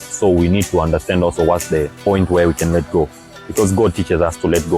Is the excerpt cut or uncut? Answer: cut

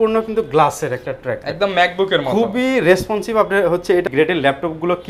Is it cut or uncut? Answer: cut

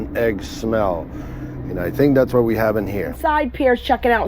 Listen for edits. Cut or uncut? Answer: cut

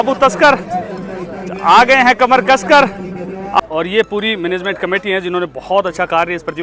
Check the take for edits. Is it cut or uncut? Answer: cut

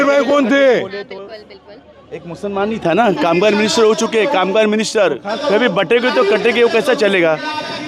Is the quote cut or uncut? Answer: cut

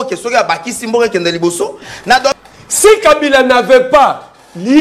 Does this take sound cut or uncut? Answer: cut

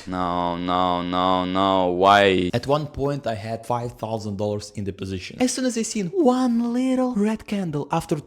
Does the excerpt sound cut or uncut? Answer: cut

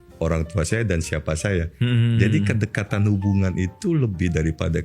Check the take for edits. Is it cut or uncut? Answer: uncut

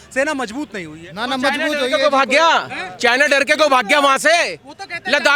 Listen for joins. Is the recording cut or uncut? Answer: uncut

